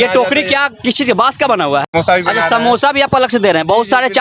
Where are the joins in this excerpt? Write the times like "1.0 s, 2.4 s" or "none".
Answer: 1.9 s